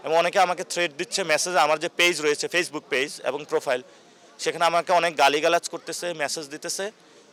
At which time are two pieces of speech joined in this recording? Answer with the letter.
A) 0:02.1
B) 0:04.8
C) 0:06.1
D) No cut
D